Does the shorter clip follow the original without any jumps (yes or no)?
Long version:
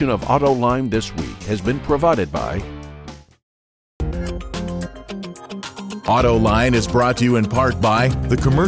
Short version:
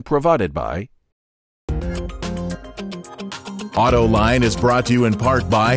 no